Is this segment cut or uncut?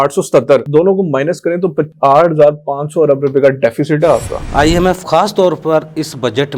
cut